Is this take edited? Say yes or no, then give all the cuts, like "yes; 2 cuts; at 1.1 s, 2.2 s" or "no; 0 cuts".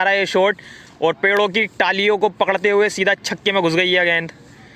no; 0 cuts